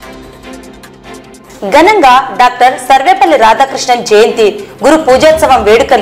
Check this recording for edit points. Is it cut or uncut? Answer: cut